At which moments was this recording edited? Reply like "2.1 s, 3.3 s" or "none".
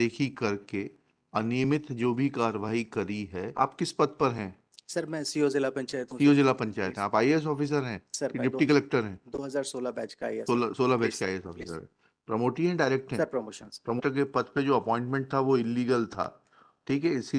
3.5 s, 14.0 s